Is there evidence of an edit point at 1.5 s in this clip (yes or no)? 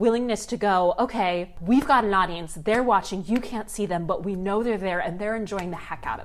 yes